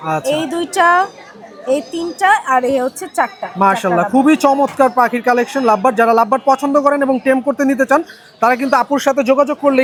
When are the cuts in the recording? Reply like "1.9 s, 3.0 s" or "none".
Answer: none